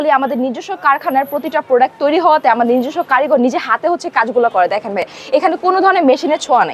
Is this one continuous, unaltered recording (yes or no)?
yes